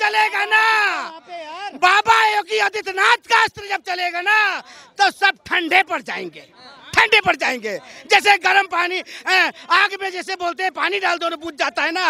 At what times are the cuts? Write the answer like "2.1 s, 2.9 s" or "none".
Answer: none

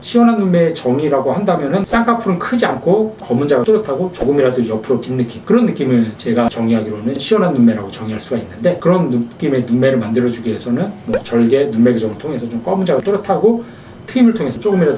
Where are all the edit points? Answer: none

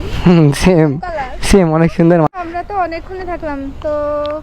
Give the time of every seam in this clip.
2.3 s

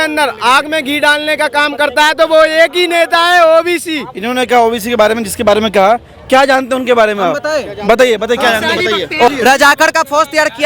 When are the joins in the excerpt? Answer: 4.1 s, 9.3 s

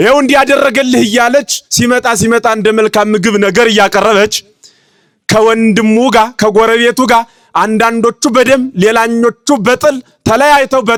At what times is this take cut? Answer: none

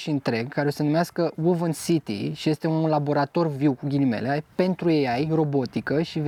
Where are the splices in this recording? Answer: none

